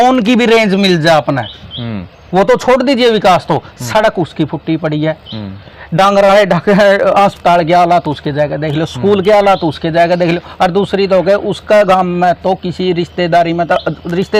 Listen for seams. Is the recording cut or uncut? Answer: uncut